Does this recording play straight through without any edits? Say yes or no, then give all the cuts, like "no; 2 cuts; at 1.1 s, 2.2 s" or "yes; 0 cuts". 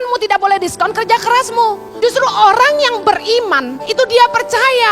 no; 2 cuts; at 1.9 s, 3.8 s